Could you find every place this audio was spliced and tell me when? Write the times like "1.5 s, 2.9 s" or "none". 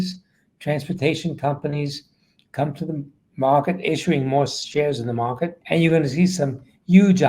5.6 s